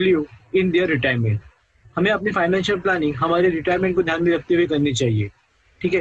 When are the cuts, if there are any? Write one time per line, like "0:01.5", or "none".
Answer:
0:02.0